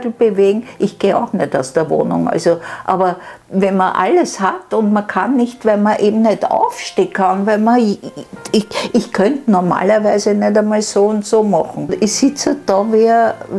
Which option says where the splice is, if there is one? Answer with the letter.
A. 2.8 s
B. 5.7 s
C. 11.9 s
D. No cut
C